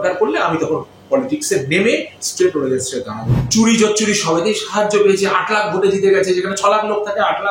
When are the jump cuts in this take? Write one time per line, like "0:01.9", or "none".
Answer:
0:03.3